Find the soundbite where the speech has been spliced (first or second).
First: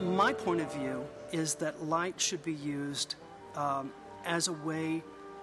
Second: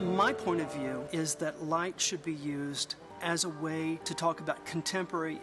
second